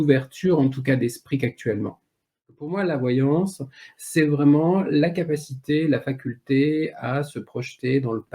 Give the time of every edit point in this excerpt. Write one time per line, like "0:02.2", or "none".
0:02.7